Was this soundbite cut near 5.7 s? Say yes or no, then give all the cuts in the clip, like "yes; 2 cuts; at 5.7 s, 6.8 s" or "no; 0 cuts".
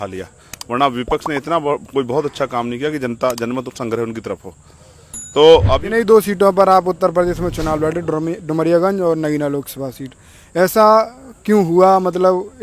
yes; 1 cut; at 5.7 s